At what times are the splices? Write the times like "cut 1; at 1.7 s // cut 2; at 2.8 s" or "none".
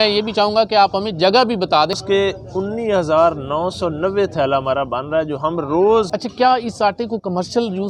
cut 1; at 2.0 s // cut 2; at 6.1 s